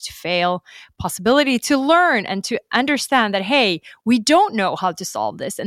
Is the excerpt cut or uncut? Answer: uncut